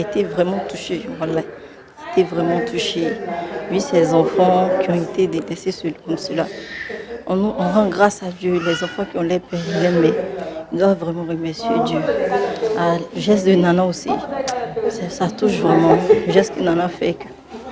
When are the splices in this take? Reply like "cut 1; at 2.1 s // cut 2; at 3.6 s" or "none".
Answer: none